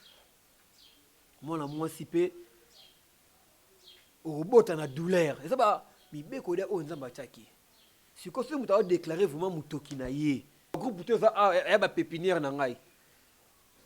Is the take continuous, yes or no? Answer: no